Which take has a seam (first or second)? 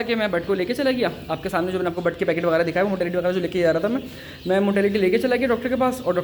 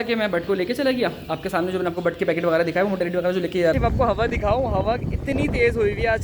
second